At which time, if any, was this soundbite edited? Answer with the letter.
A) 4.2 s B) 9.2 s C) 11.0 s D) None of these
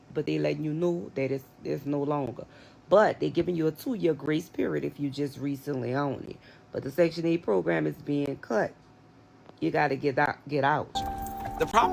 C